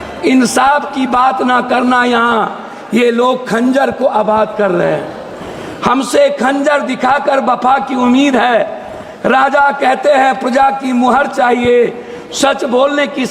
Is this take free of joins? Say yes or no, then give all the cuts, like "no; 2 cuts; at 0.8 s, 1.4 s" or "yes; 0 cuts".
yes; 0 cuts